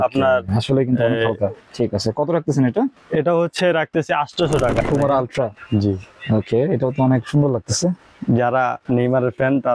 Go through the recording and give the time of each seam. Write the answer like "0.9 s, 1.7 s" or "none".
1.6 s, 4.8 s